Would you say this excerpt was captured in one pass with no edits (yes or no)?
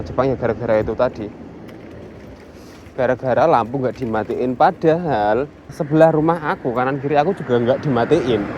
no